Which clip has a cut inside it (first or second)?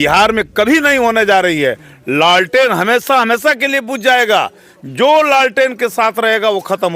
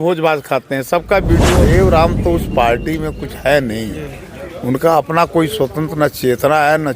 second